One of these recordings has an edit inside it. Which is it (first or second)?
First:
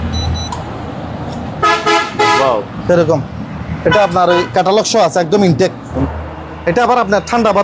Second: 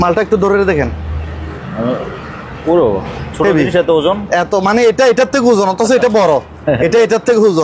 first